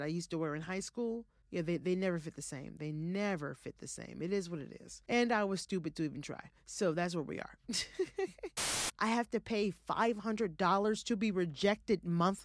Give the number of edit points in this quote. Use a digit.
3